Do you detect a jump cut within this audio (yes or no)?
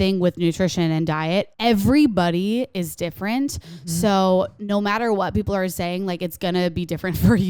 yes